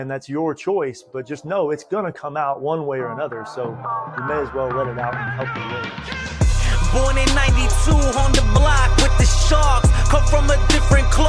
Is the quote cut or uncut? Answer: cut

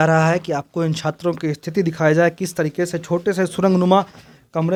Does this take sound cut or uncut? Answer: uncut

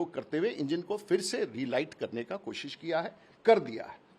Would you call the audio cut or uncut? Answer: uncut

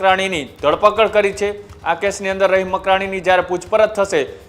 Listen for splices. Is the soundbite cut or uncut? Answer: uncut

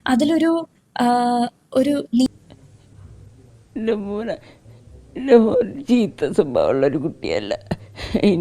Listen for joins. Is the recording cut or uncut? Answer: cut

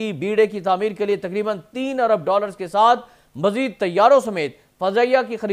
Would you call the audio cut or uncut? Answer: uncut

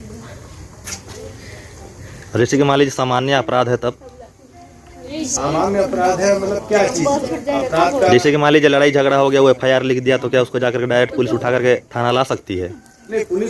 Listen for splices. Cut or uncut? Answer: uncut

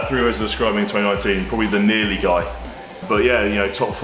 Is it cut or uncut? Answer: cut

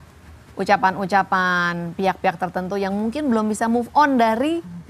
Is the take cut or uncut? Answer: uncut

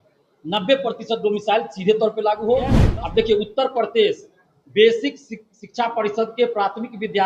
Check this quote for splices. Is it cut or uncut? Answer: cut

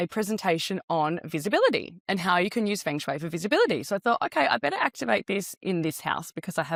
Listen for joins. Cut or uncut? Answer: uncut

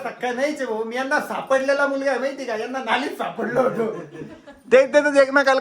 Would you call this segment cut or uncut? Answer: uncut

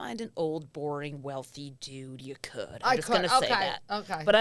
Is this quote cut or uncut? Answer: uncut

